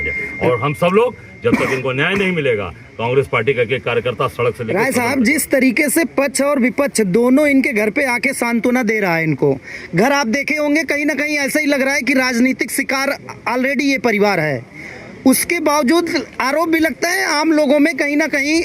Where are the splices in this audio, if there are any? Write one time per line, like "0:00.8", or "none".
0:04.7